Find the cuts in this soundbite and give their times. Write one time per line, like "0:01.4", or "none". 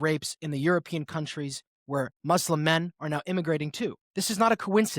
0:04.0